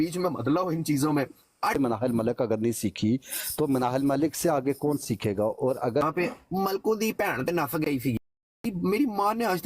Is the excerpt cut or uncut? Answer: cut